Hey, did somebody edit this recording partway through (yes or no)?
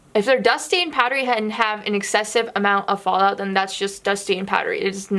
no